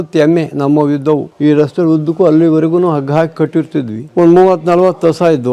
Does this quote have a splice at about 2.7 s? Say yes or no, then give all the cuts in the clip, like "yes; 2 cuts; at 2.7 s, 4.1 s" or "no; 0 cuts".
no; 2 cuts; at 1.3 s, 4.0 s